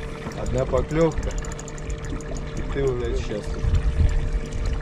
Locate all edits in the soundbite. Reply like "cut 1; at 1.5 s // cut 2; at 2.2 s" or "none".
cut 1; at 3.2 s